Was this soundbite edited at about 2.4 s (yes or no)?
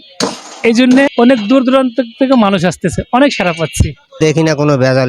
no